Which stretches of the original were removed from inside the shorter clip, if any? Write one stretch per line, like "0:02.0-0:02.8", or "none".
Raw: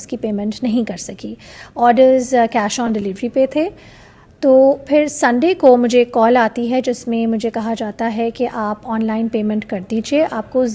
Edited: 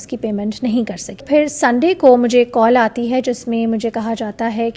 0:01.2-0:04.8